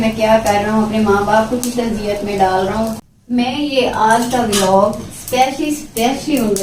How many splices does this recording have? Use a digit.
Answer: 1